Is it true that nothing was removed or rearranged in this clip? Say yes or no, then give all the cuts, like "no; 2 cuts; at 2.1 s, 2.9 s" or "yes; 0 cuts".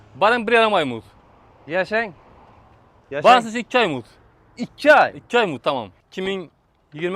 no; 1 cut; at 6.0 s